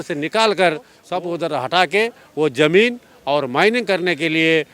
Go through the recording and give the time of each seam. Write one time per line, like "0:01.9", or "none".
0:01.0

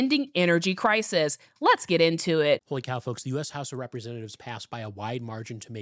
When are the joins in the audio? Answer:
0:02.7

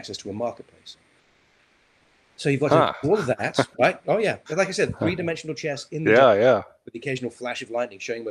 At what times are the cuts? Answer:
none

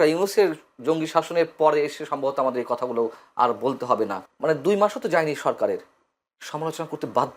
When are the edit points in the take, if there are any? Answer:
0:04.2

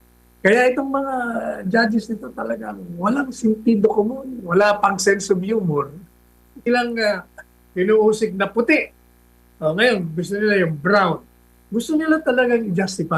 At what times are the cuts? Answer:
0:06.6

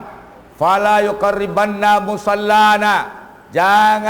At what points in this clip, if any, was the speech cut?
none

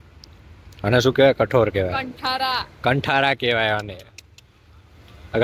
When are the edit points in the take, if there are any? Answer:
0:02.7

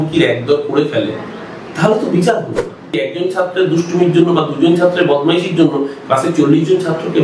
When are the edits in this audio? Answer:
0:03.0

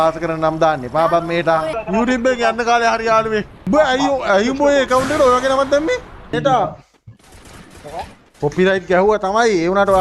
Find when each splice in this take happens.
0:01.8
0:03.5
0:06.3

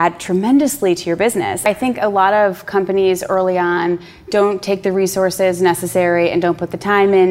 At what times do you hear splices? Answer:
0:01.7

